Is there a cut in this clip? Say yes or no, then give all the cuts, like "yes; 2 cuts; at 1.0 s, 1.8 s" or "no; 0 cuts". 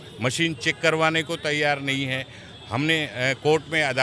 no; 0 cuts